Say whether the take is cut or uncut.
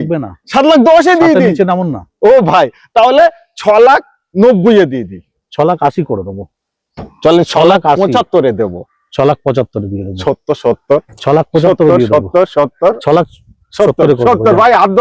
uncut